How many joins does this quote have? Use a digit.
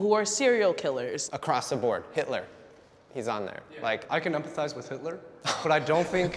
2